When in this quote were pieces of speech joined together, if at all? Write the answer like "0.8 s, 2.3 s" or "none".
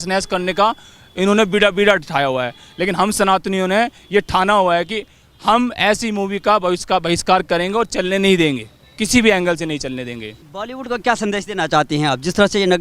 none